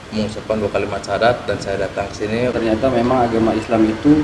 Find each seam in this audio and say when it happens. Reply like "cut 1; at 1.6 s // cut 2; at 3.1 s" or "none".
cut 1; at 2.5 s